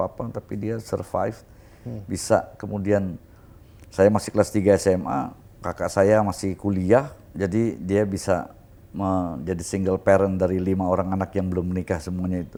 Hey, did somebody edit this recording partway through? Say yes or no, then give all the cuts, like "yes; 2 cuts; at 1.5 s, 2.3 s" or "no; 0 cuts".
no; 0 cuts